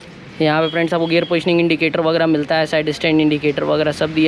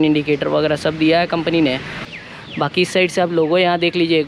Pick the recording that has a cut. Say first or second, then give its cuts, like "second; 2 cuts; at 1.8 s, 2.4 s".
second; 1 cut; at 2.1 s